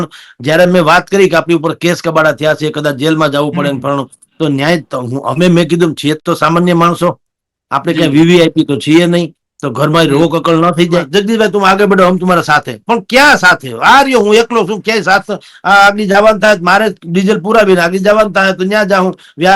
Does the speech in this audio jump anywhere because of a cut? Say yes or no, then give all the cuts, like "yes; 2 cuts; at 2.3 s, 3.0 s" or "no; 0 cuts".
yes; 1 cut; at 11.1 s